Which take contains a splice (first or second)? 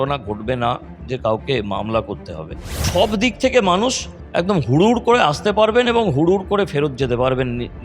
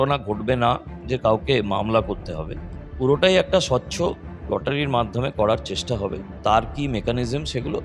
first